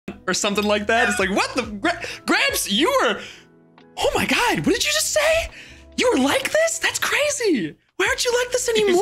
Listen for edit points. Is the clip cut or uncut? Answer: uncut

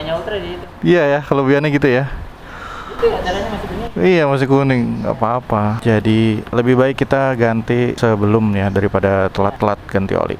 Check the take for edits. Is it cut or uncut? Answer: cut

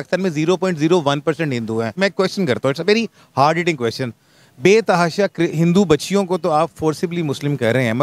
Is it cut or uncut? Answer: cut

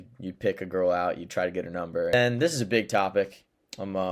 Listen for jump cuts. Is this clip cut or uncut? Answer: cut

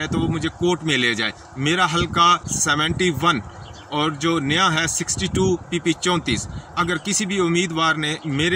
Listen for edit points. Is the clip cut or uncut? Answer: uncut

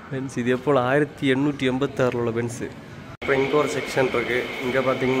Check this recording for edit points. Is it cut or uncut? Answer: uncut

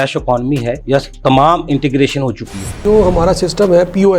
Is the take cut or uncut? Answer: cut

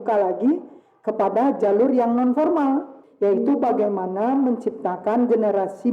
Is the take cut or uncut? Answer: cut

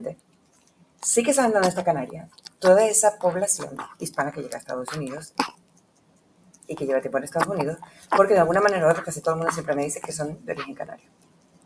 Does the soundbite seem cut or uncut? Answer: uncut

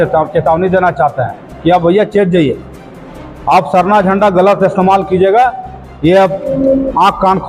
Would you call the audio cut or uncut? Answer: uncut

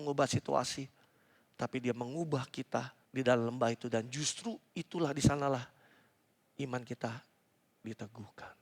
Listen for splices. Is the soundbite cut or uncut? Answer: cut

